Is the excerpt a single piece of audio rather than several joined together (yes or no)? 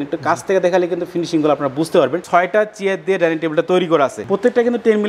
no